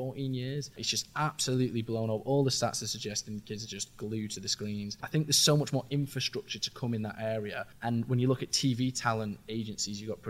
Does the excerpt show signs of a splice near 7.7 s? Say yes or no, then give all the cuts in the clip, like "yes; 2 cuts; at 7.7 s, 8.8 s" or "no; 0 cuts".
yes; 3 cuts; at 0.9 s, 5.0 s, 7.7 s